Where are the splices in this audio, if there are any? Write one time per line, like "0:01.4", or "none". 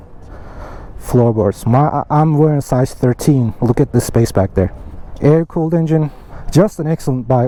none

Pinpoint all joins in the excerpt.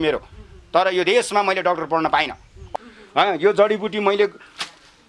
0:02.6

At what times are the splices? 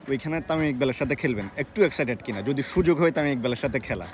none

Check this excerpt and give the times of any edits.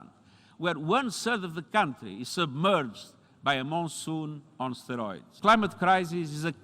0:05.2

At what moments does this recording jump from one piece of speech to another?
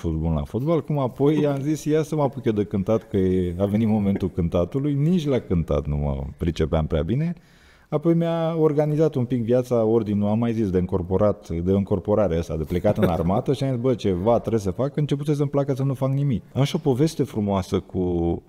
0:16.5

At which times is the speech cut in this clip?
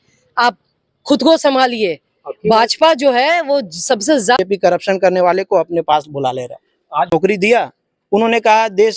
0:04.4
0:06.8

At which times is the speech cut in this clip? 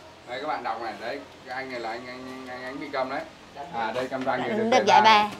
0:03.6

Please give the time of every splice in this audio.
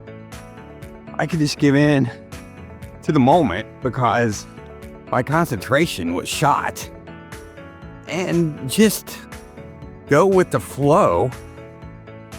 0:01.2

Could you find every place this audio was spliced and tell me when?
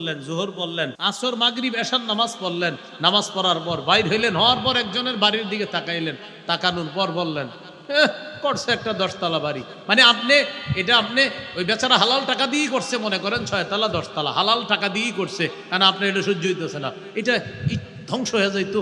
0:01.0

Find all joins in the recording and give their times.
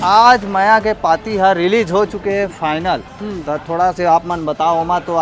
none

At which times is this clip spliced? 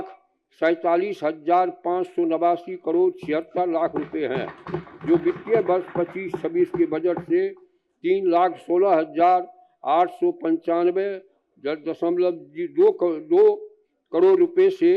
none

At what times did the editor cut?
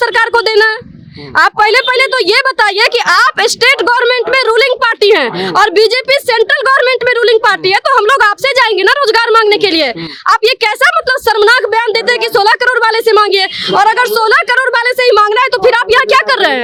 none

